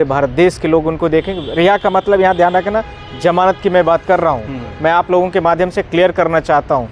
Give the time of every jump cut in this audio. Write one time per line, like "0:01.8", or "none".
none